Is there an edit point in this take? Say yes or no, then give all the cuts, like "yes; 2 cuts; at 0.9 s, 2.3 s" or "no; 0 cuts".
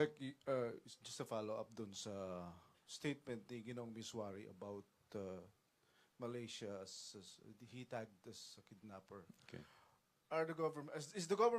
yes; 1 cut; at 1.7 s